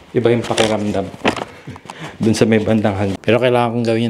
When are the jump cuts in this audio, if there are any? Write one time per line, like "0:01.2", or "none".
0:03.1